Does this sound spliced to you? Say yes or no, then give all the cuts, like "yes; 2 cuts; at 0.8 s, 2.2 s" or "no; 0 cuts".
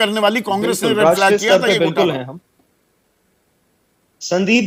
no; 0 cuts